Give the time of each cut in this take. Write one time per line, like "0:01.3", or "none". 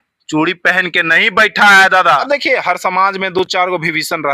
0:02.2